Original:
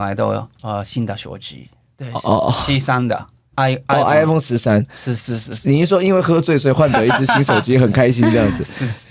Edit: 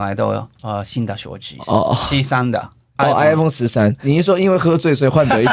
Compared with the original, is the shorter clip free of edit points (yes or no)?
no